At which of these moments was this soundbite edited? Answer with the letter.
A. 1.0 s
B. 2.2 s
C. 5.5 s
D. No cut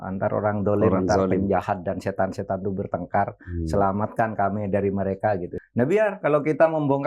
C